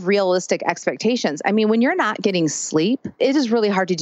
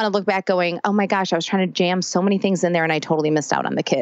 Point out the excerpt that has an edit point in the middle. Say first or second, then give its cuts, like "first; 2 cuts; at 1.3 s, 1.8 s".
first; 1 cut; at 3.1 s